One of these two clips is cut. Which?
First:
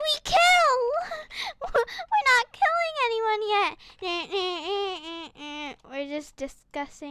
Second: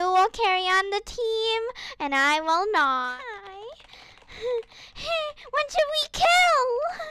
second; 1 cut; at 3.0 s

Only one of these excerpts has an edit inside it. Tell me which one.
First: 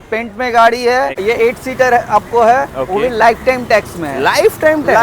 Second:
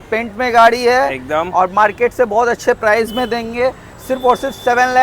first; 1 cut; at 1.2 s

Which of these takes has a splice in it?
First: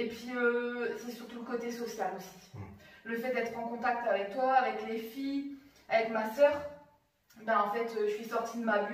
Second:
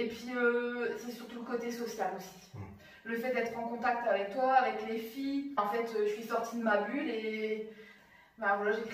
second; 1 cut; at 5.6 s

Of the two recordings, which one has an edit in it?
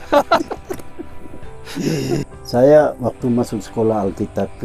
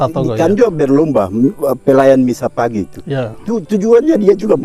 first; 1 cut; at 2.2 s

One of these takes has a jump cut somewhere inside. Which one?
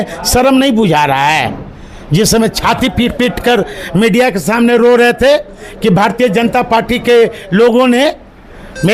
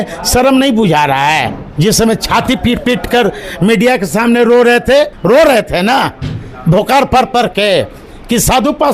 second; 2 cuts; at 1.6 s, 5.2 s

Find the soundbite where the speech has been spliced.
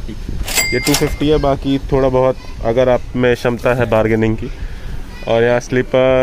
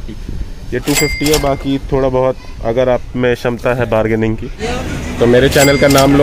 second; 1 cut; at 4.6 s

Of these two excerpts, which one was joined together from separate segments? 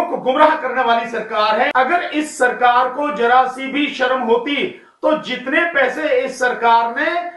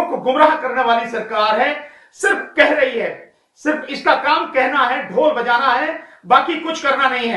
first; 1 cut; at 1.7 s

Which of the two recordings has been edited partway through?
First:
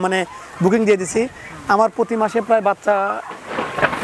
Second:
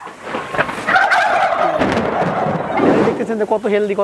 second; 1 cut; at 2.9 s

